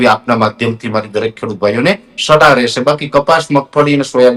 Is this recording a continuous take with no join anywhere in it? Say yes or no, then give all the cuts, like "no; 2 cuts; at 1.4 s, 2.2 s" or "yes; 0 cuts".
yes; 0 cuts